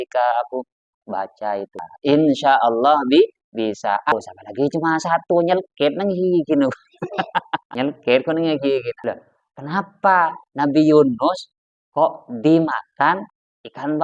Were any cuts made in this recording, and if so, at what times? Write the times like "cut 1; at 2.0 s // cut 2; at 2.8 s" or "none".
cut 1; at 1.9 s // cut 2; at 4.1 s